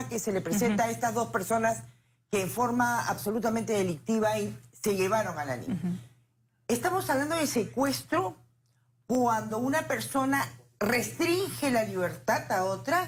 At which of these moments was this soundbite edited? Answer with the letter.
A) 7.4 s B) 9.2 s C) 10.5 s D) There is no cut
D